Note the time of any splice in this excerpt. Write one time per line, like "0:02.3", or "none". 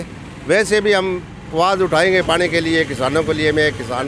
none